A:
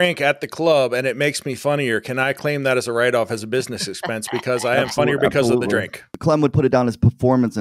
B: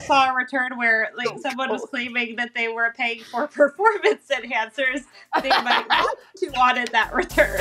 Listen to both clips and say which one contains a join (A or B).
A